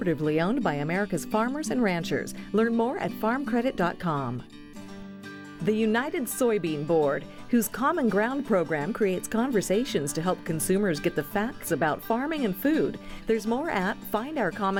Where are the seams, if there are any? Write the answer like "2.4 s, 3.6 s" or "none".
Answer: none